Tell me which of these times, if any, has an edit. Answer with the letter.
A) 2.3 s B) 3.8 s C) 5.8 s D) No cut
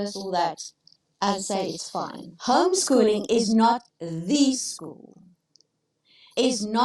A